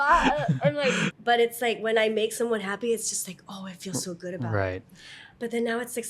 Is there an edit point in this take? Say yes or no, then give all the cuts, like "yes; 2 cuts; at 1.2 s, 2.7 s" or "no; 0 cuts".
yes; 1 cut; at 1.1 s